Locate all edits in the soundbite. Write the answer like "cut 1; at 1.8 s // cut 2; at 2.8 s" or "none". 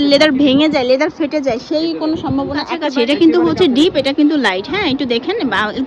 cut 1; at 2.8 s